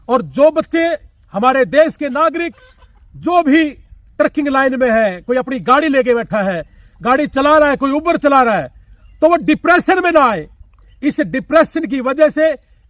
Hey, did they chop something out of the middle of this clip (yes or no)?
no